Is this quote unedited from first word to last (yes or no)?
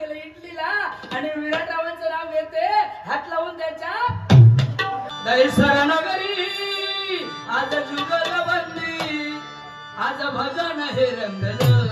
no